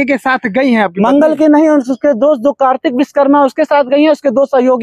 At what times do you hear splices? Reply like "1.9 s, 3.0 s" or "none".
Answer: none